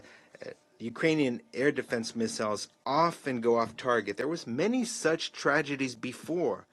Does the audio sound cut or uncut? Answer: uncut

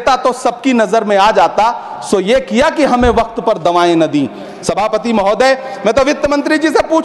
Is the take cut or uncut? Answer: uncut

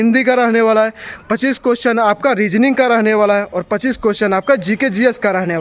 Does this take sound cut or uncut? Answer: uncut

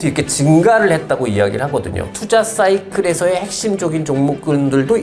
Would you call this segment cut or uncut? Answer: cut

